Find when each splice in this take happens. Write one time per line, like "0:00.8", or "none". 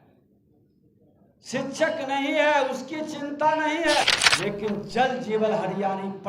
0:04.1